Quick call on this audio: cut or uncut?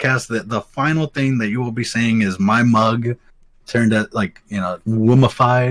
cut